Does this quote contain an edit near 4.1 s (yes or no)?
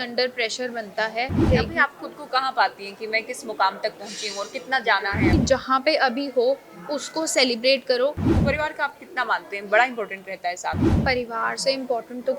no